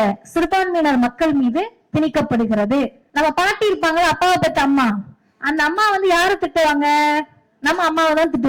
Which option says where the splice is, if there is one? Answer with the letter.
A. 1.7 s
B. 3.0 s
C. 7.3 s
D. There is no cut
B